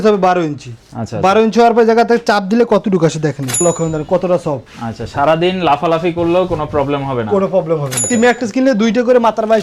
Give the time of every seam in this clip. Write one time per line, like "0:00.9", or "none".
0:03.6
0:08.1